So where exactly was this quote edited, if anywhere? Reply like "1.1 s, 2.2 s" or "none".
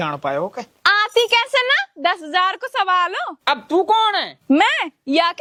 none